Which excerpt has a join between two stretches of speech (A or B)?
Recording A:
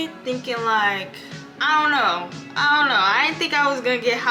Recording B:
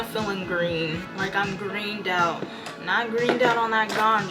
B